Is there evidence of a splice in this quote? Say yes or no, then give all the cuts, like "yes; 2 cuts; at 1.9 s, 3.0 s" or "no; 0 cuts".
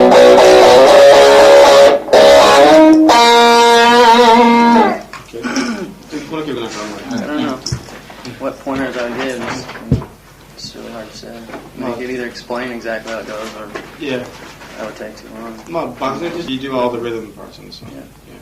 yes; 1 cut; at 5.1 s